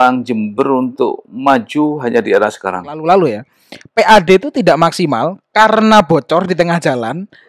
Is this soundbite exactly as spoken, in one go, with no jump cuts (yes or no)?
no